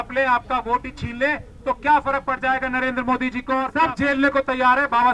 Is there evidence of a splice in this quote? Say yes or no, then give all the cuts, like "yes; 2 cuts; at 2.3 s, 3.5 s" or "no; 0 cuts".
yes; 1 cut; at 3.7 s